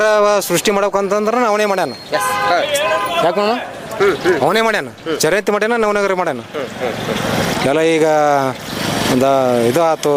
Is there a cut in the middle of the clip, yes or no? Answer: no